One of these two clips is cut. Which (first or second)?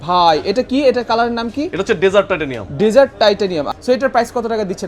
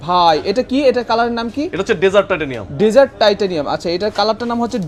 first